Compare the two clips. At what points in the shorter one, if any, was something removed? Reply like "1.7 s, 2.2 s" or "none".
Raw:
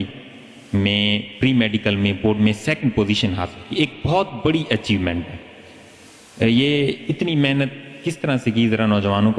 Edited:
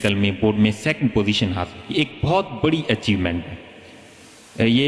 none